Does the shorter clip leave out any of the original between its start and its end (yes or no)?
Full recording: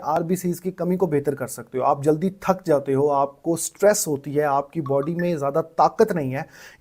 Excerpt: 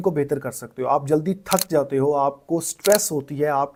no